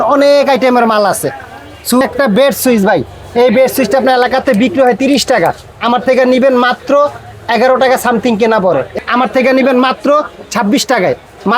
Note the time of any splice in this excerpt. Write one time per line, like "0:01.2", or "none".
0:08.9